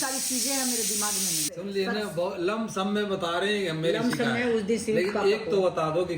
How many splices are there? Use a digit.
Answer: 1